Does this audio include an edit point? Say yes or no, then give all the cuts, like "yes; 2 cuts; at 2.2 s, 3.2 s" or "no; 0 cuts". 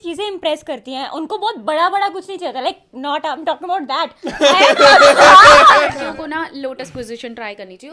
yes; 1 cut; at 5.9 s